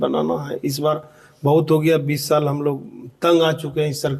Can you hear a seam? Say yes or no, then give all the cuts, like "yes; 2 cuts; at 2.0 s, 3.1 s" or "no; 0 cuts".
no; 0 cuts